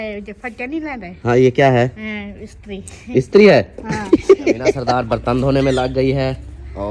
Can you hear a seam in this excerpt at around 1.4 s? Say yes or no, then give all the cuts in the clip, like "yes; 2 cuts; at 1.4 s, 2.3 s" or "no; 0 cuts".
no; 1 cut; at 4.8 s